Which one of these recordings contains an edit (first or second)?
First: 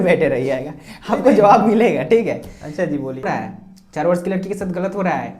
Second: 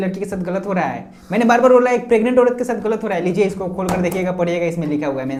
first